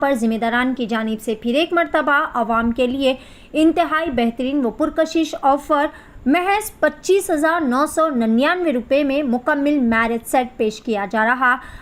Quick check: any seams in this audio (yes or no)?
no